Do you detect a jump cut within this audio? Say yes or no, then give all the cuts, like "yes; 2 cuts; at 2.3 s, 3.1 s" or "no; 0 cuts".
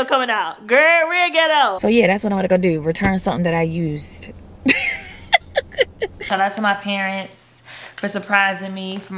yes; 2 cuts; at 1.8 s, 6.2 s